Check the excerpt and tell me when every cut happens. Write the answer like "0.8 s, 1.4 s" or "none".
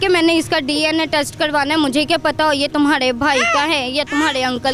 none